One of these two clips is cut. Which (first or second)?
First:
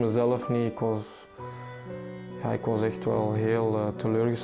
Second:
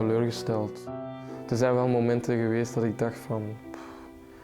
second